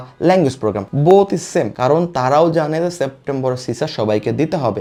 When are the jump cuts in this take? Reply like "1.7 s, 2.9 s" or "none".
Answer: none